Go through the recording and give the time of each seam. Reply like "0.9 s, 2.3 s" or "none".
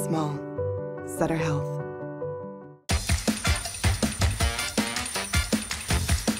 none